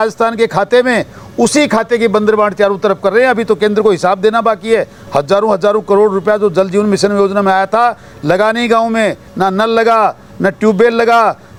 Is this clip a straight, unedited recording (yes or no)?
yes